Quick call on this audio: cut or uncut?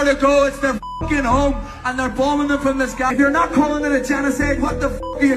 cut